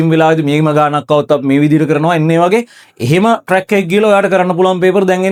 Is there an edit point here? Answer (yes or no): no